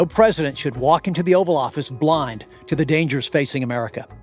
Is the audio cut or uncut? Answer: uncut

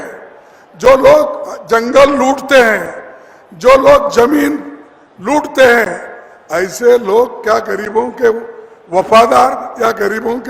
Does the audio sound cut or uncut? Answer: uncut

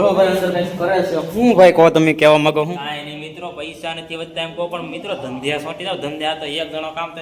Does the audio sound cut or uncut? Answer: uncut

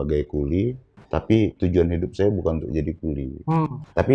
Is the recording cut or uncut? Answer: uncut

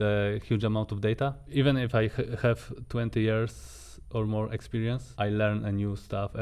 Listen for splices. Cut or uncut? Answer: cut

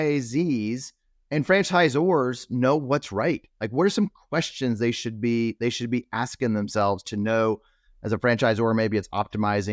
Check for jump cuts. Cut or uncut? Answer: cut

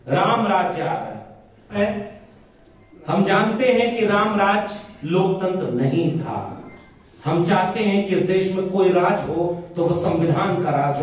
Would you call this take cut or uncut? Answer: cut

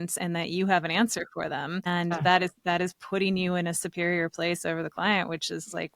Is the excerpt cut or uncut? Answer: cut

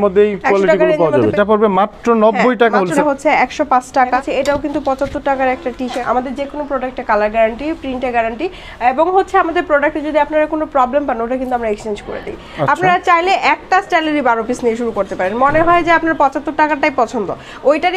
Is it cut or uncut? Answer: cut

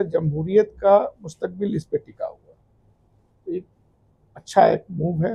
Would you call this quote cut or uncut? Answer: uncut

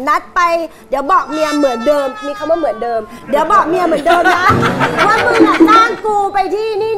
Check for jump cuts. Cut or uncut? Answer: uncut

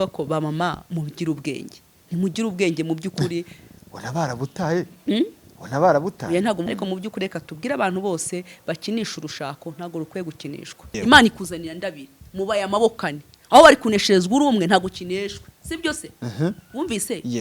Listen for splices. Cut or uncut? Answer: cut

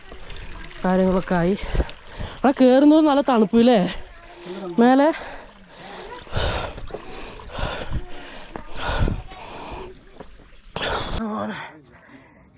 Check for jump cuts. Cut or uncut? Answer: cut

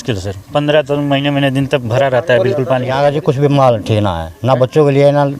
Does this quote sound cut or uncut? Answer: cut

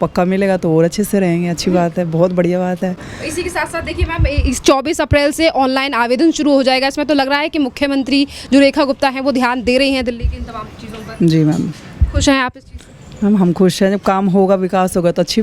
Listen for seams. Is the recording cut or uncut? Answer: uncut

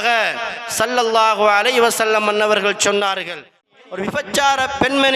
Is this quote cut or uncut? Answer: cut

